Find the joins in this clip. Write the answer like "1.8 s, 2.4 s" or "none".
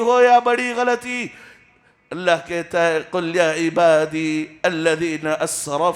none